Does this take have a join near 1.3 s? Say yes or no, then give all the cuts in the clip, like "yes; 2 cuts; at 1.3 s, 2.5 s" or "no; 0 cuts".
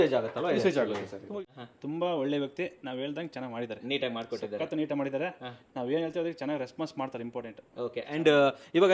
yes; 1 cut; at 1.3 s